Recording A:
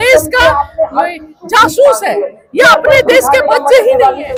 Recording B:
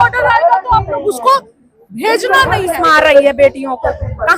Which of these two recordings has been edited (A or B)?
B